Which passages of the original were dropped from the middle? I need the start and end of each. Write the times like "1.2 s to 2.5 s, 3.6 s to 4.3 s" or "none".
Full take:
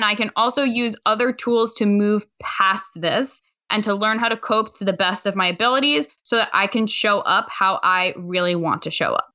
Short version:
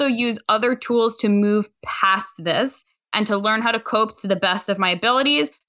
none